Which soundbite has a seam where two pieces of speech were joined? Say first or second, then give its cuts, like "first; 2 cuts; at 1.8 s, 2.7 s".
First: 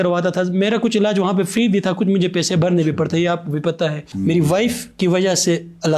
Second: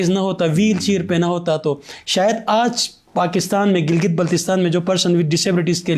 first; 1 cut; at 4.1 s